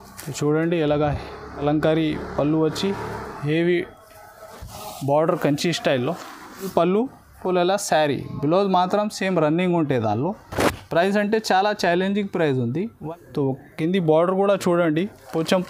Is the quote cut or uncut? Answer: cut